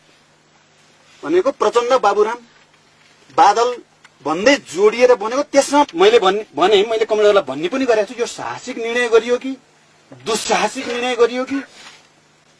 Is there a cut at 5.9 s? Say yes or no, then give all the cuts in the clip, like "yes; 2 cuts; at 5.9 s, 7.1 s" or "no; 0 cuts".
yes; 1 cut; at 5.9 s